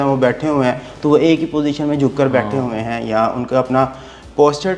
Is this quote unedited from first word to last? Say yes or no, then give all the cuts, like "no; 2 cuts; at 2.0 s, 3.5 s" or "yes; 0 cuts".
yes; 0 cuts